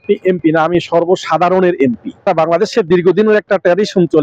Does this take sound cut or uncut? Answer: cut